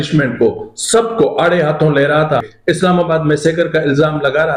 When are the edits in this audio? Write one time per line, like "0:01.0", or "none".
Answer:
0:02.5

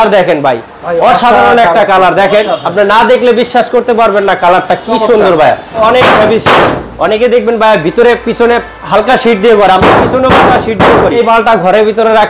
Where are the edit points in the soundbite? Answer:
0:05.8
0:11.2

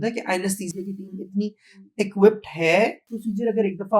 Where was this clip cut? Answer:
0:03.1

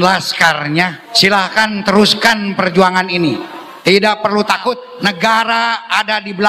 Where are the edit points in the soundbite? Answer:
0:01.0
0:04.9

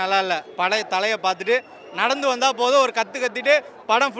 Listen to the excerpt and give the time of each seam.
none

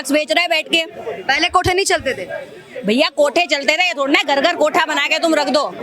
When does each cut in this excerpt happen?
none

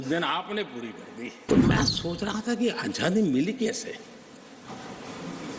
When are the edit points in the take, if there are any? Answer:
0:01.4

